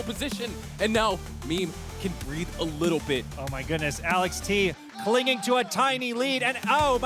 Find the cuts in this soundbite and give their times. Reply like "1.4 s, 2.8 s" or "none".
3.3 s